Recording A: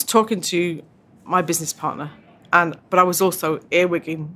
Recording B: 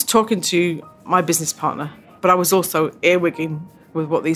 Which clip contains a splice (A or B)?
B